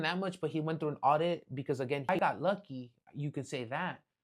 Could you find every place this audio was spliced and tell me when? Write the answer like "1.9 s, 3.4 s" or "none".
2.1 s